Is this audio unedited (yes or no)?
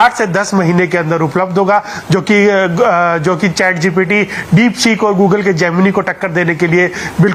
yes